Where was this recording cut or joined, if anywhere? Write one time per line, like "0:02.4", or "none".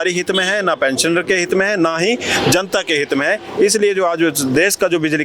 none